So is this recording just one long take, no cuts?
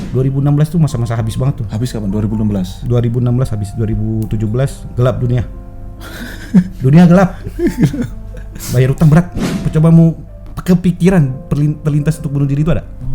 no; 1 cut; at 9.4 s

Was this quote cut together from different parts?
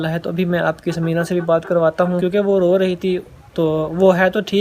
yes; 1 cut; at 2.2 s

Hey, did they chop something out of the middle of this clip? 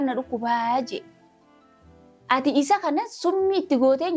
no; 0 cuts

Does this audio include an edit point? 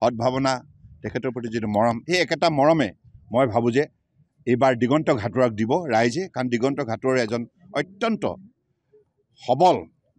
no; 0 cuts

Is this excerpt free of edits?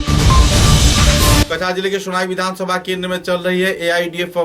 no; 1 cut; at 1.4 s

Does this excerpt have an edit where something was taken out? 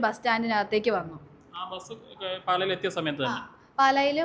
no; 0 cuts

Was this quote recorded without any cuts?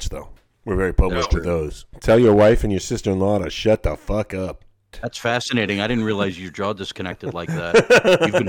no; 2 cuts; at 1.8 s, 5.0 s

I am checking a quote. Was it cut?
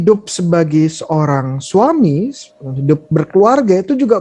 no; 0 cuts

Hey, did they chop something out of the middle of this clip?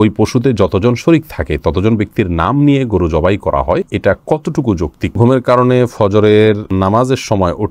yes; 3 cuts; at 3.9 s, 5.2 s, 6.7 s

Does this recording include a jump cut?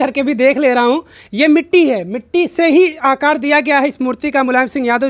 no; 0 cuts

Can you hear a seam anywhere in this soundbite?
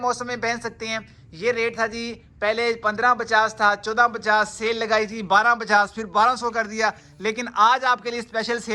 no; 0 cuts

